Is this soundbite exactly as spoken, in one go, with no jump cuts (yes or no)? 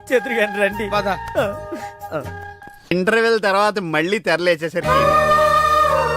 no